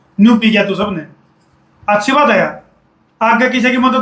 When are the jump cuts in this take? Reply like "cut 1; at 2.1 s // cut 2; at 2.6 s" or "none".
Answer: none